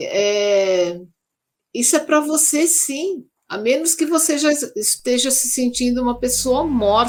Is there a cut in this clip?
no; 0 cuts

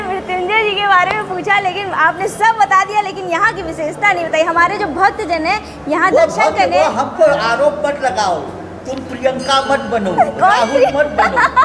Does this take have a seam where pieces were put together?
no; 0 cuts

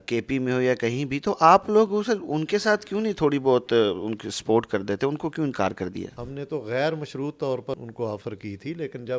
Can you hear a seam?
yes; 2 cuts; at 6.2 s, 7.8 s

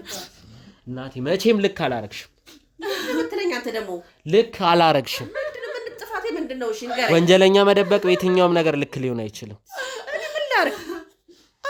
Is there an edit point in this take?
no; 0 cuts

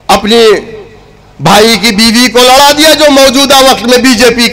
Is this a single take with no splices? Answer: yes; 0 cuts

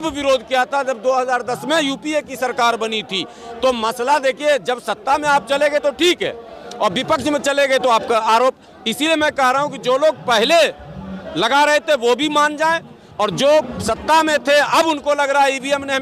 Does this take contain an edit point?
no; 0 cuts

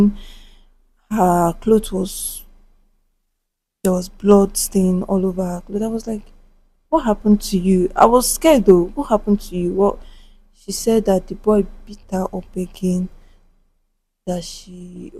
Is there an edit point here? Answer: no; 0 cuts

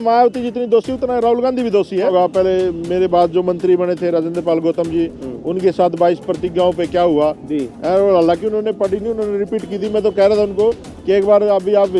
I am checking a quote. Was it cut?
yes; 1 cut; at 2.1 s

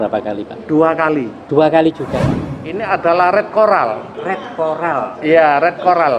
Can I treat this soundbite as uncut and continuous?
no; 1 cut; at 2.4 s

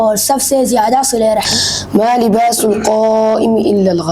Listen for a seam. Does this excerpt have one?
yes; 1 cut; at 1.5 s

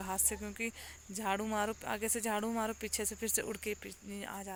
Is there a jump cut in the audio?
no; 0 cuts

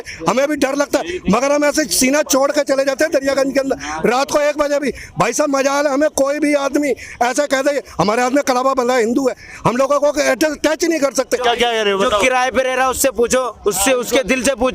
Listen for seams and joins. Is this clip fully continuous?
no; 1 cut; at 11.4 s

